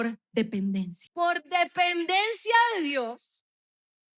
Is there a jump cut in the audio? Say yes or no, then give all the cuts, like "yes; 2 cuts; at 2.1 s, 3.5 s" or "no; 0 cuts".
yes; 1 cut; at 1.0 s